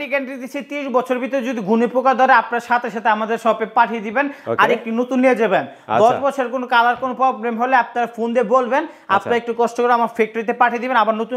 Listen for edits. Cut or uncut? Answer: uncut